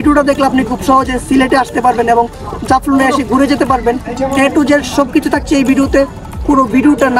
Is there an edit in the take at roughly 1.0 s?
no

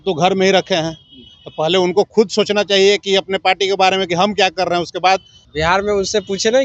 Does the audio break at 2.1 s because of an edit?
no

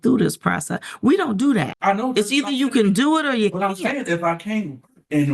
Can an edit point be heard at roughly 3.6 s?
no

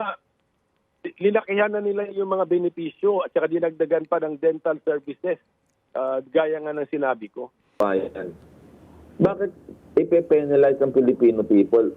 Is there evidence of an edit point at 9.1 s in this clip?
no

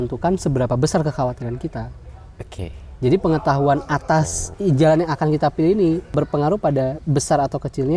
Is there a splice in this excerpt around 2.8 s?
no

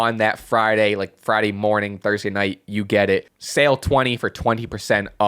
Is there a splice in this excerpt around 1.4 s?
no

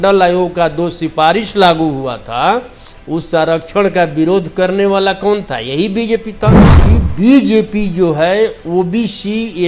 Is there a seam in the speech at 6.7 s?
yes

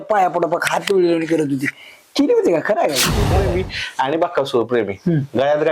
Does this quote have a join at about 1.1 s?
no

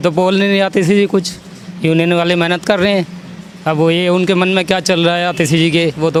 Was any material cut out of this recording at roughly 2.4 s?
no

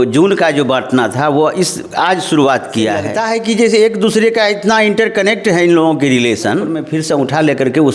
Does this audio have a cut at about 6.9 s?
yes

